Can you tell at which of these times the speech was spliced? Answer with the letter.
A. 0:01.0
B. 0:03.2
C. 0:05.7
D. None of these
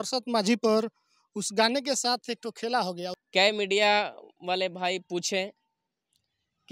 B